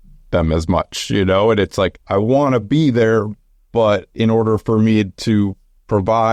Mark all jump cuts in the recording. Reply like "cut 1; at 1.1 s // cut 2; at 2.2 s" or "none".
cut 1; at 2.0 s

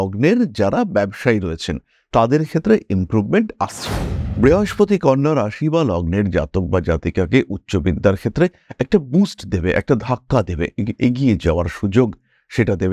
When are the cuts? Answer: cut 1; at 4.2 s

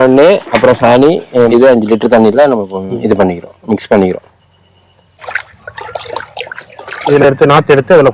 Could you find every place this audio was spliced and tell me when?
cut 1; at 1.5 s // cut 2; at 5.2 s // cut 3; at 7.0 s

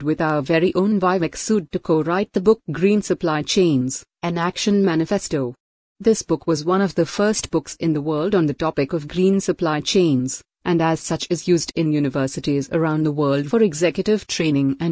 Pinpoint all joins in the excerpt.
cut 1; at 9.1 s // cut 2; at 10.5 s

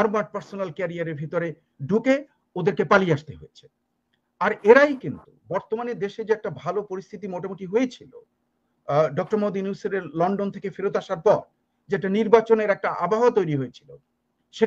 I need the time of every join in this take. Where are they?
none

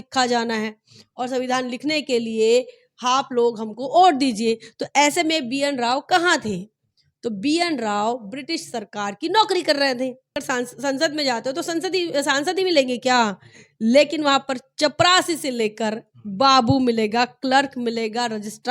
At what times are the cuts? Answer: cut 1; at 10.4 s

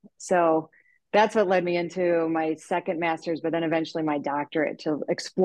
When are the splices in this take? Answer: none

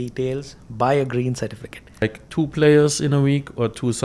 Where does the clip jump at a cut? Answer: cut 1; at 2.1 s

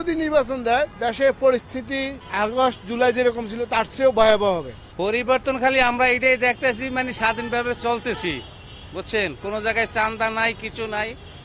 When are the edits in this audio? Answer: cut 1; at 0.9 s // cut 2; at 2.2 s // cut 3; at 4.9 s

